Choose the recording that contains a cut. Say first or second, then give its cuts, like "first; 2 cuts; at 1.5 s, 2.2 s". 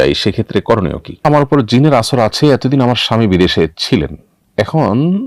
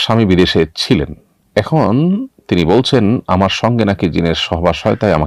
first; 1 cut; at 1.2 s